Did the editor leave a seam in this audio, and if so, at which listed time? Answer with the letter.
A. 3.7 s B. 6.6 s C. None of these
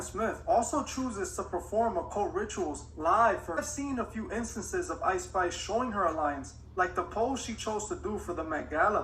A